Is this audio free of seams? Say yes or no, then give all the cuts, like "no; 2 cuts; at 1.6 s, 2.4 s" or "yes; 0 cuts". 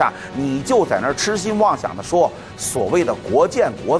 yes; 0 cuts